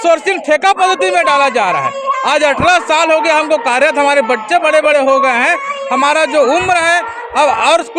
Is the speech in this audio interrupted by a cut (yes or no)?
no